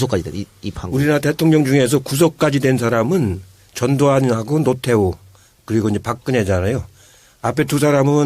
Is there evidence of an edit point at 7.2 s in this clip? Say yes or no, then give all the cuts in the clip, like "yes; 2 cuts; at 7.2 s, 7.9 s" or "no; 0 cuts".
no; 1 cut; at 4.4 s